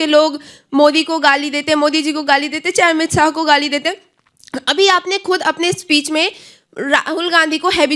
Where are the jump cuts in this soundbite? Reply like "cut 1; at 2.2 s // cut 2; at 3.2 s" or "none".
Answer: none